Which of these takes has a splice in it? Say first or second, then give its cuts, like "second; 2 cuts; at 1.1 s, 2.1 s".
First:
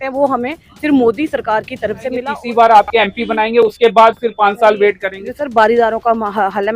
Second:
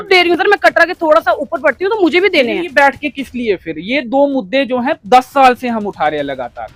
first; 1 cut; at 2.2 s